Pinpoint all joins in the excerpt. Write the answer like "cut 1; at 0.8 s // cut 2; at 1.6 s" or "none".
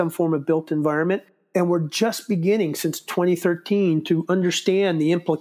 none